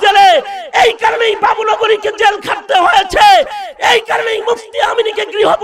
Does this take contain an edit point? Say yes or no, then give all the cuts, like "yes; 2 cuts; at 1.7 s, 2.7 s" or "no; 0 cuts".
no; 0 cuts